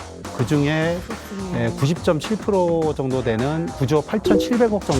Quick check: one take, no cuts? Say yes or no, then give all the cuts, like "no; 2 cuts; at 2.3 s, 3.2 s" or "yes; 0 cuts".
no; 1 cut; at 4.0 s